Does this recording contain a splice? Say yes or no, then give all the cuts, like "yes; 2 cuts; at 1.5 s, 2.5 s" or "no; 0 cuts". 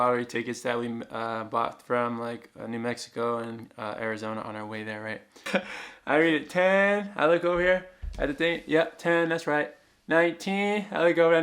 yes; 1 cut; at 5.5 s